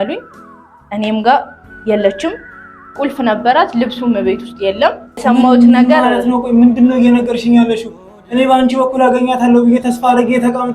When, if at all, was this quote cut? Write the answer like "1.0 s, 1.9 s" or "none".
5.2 s